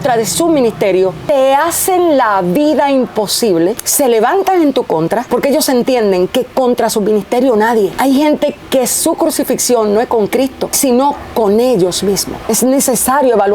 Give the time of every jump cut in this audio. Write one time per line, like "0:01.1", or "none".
0:01.2
0:03.8
0:05.2
0:07.9
0:10.7
0:12.4